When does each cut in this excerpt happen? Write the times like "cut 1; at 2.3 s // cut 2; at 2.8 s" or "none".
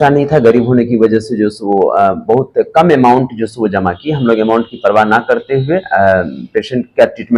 none